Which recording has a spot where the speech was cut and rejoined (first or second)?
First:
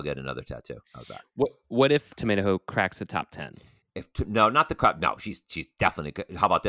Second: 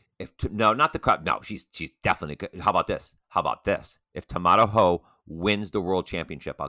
first